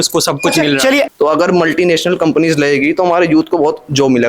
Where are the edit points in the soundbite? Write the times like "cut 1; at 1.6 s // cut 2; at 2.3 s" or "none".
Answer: cut 1; at 1.1 s